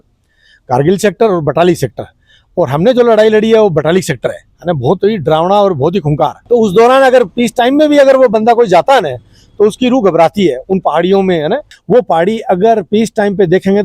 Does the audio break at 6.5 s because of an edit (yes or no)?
yes